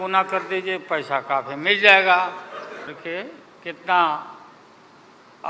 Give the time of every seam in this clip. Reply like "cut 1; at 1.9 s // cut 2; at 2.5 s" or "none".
cut 1; at 3.0 s